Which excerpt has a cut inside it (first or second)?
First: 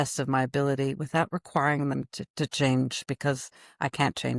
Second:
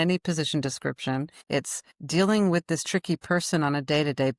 second